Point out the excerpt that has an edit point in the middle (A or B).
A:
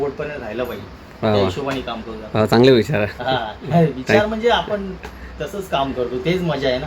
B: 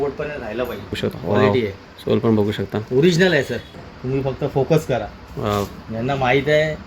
B